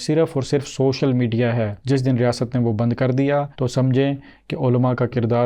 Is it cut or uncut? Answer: uncut